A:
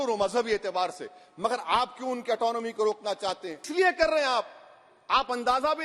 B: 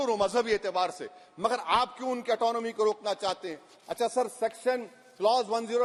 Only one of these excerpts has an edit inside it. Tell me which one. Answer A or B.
A